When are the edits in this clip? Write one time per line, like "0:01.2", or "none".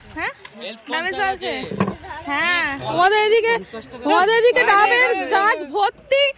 0:03.0